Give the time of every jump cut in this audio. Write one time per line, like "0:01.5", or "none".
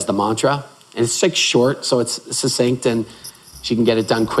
none